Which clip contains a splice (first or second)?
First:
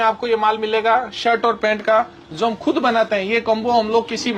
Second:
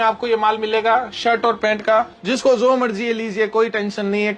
second